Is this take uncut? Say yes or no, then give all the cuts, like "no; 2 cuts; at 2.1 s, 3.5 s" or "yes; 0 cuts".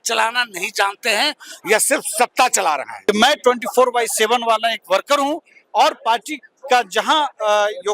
no; 1 cut; at 2.9 s